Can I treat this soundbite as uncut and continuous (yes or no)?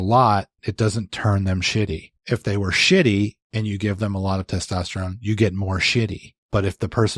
yes